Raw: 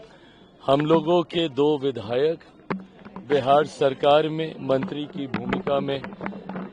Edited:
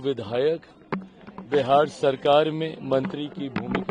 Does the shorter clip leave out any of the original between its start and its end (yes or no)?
no